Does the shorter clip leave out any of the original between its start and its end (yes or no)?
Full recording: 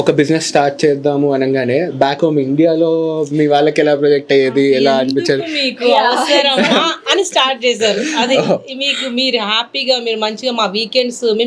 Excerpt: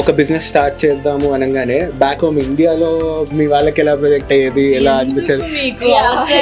no